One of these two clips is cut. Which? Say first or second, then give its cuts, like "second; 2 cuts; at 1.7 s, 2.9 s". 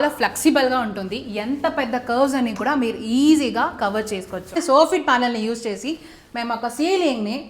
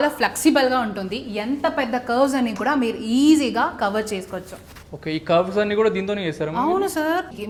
first; 1 cut; at 4.6 s